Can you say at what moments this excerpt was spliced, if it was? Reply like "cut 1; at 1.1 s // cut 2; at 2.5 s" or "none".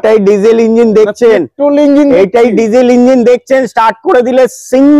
none